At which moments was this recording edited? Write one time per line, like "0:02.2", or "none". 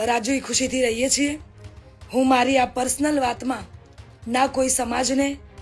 none